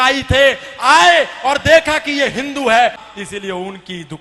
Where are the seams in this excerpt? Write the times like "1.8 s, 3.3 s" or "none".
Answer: 3.0 s